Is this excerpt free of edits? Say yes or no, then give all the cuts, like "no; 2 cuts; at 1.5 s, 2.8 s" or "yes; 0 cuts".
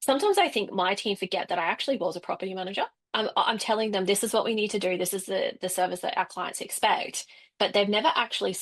yes; 0 cuts